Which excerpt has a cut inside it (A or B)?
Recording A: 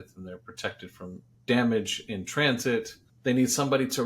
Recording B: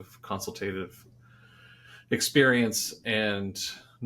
A